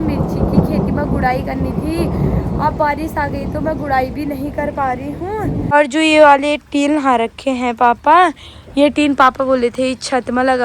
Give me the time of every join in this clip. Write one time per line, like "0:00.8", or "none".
0:05.6

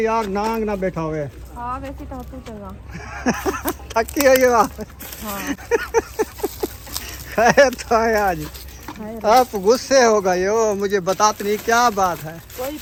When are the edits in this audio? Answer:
none

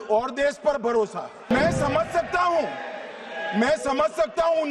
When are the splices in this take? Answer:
0:01.5

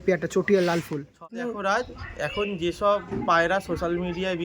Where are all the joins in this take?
0:01.6

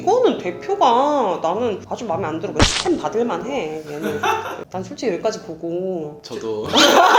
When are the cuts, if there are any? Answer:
0:05.0

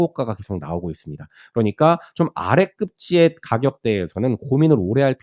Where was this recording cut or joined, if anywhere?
none

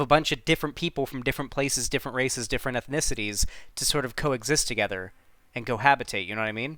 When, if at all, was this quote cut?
none

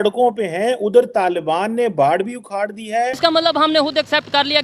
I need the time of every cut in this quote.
0:03.2

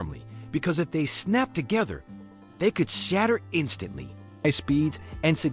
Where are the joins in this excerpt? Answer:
0:04.4

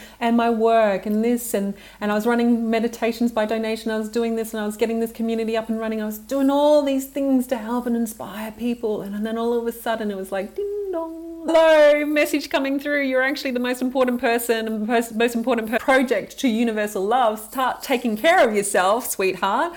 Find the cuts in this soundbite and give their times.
0:11.5
0:15.7

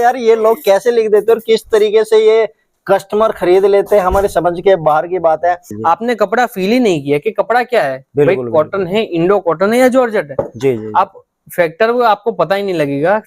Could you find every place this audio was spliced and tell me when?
0:05.7

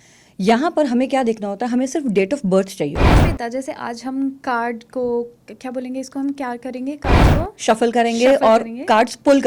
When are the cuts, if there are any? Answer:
0:03.2

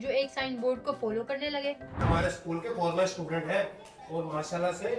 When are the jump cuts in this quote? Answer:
0:02.0

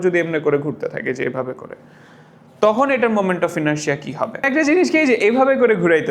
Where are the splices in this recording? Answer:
0:04.5

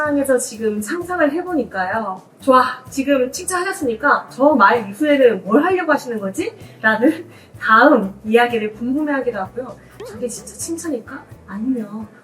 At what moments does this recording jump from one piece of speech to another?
0:02.3
0:09.9

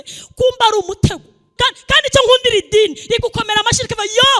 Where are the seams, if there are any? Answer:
0:01.5

